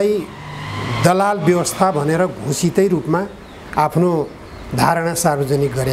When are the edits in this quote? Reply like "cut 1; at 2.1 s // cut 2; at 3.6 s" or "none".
none